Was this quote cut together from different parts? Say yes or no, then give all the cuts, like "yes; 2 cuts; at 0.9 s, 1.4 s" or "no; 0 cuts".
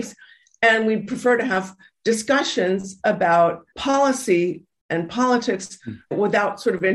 yes; 2 cuts; at 3.7 s, 6.1 s